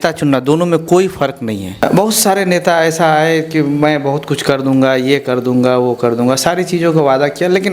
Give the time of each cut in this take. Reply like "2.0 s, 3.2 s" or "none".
1.7 s